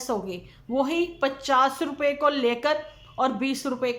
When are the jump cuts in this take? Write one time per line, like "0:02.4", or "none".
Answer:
none